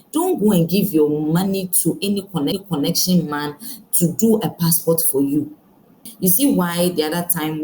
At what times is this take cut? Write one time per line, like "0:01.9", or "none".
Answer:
0:06.1